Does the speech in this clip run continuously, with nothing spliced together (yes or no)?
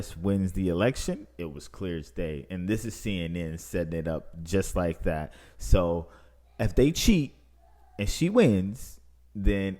yes